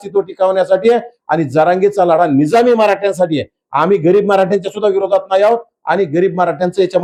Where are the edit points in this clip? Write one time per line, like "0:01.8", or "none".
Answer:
none